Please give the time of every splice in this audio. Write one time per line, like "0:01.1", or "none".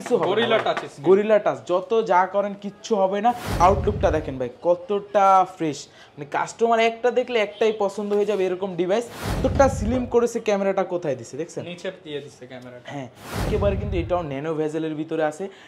0:03.6
0:09.4
0:13.4